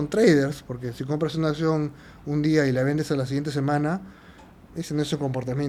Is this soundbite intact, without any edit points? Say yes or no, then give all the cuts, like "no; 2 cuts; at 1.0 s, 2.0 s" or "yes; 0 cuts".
yes; 0 cuts